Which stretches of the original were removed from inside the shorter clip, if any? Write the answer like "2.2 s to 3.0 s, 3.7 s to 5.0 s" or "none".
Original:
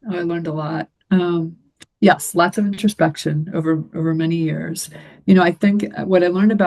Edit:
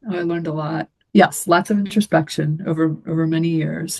0.9 s to 1.8 s